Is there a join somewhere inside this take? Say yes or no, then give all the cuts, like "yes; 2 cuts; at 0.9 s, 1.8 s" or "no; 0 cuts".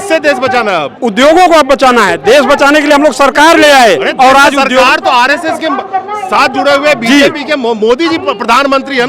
no; 0 cuts